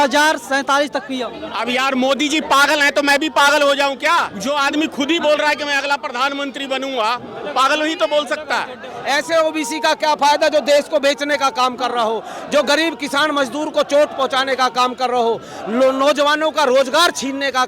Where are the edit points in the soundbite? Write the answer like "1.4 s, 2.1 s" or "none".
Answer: 1.4 s, 4.3 s, 8.9 s

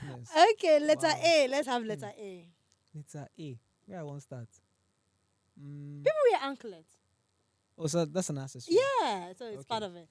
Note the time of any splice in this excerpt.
none

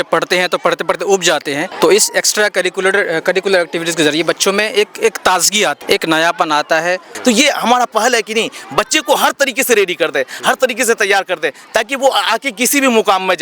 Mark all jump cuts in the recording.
1.7 s, 5.8 s, 7.1 s

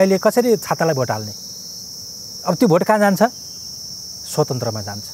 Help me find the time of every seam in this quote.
none

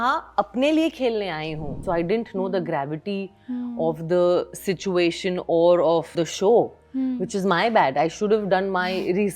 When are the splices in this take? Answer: 1.8 s

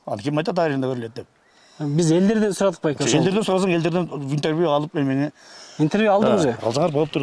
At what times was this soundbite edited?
none

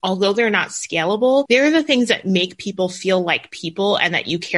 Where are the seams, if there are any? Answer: 1.5 s

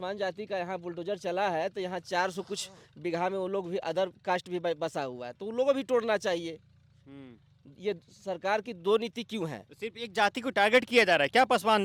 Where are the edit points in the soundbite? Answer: none

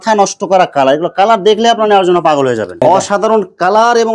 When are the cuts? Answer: 2.7 s

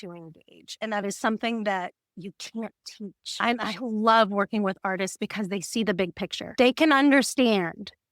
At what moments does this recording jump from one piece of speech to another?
3.2 s

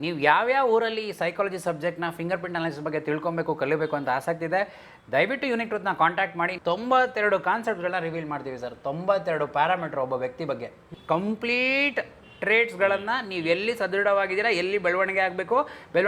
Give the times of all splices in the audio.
6.5 s, 10.9 s

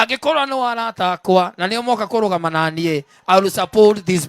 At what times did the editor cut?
1.7 s

